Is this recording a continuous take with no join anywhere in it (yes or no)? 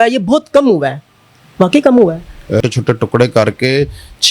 no